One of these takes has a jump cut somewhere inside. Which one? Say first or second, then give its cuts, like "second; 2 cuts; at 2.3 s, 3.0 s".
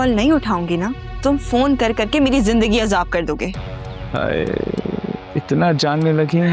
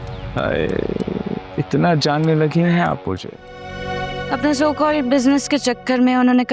second; 1 cut; at 3.7 s